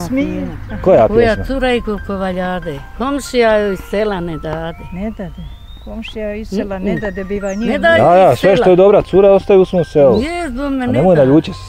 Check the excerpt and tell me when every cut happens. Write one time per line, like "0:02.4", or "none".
none

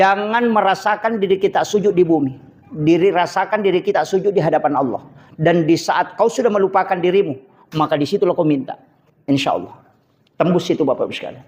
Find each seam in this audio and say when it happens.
none

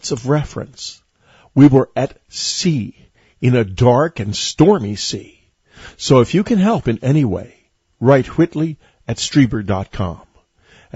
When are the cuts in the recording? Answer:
none

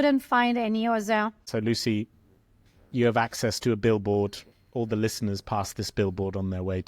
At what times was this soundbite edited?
0:01.5

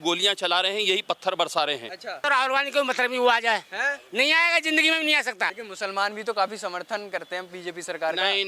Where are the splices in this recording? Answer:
0:02.2
0:05.5

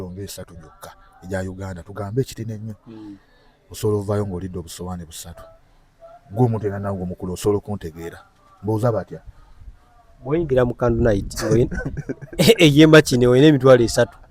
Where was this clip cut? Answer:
none

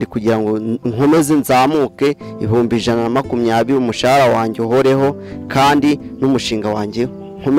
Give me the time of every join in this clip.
none

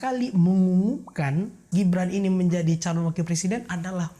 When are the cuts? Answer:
0:01.7

